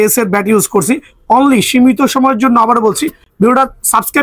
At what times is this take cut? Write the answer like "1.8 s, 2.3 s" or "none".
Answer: none

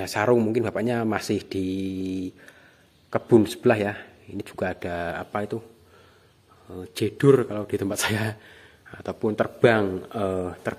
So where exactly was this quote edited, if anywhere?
none

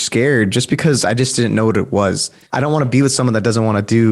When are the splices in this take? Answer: 2.4 s

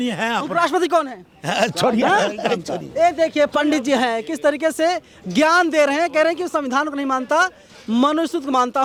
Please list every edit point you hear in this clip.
none

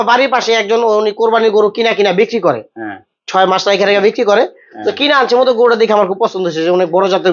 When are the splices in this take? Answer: none

